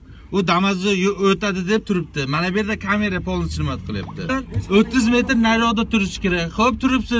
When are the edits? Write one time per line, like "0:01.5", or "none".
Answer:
0:04.3